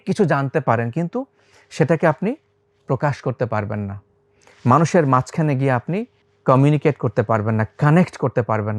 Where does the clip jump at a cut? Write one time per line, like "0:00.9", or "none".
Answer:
none